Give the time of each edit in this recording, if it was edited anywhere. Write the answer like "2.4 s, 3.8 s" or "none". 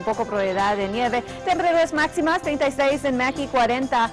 none